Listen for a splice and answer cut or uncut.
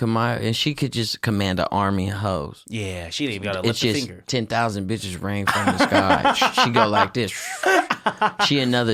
uncut